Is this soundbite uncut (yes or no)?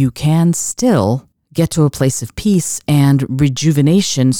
yes